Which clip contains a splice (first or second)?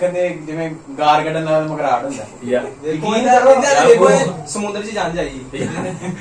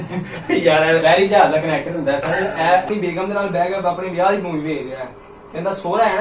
second